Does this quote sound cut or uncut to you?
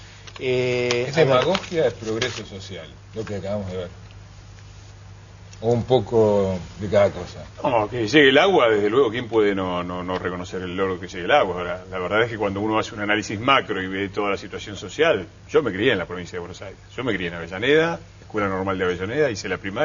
uncut